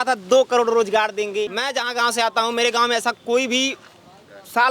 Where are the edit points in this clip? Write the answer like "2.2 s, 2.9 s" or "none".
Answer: 1.6 s